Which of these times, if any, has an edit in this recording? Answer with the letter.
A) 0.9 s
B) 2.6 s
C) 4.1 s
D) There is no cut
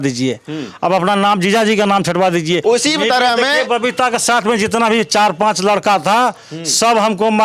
B